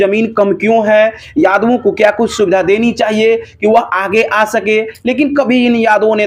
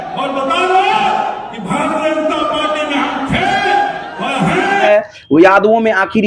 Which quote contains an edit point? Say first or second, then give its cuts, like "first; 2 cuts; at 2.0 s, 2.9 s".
second; 1 cut; at 4.8 s